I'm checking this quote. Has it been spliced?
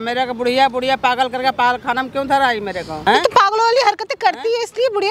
yes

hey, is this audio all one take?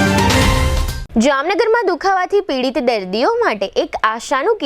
no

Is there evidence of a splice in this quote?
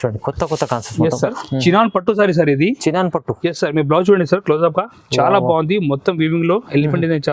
yes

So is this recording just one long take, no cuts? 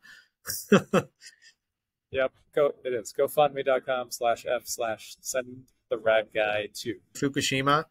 yes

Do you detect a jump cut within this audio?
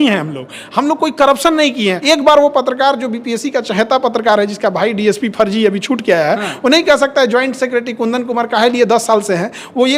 yes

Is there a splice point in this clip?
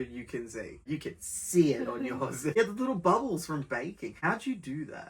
yes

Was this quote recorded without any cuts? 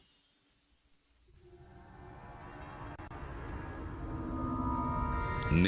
yes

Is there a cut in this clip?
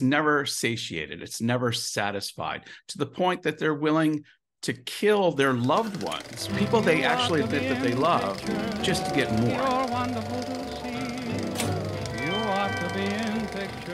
yes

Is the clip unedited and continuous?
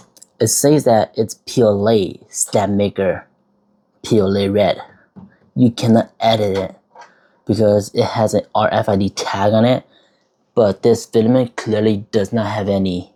yes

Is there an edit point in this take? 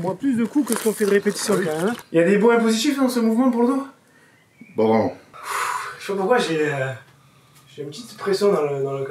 yes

